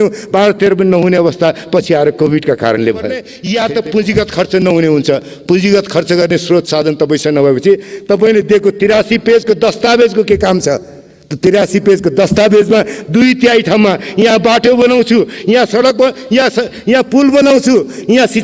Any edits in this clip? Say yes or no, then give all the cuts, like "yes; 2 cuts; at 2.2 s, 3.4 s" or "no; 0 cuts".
yes; 1 cut; at 3.3 s